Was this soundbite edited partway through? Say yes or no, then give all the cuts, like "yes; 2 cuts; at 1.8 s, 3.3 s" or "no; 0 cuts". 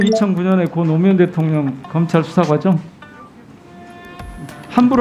no; 0 cuts